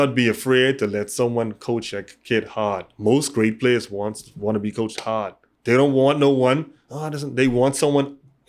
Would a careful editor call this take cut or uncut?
uncut